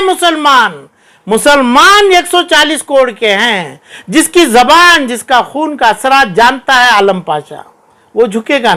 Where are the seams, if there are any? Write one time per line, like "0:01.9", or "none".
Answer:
none